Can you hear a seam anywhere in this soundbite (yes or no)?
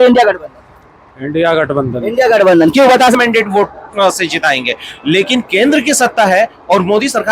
yes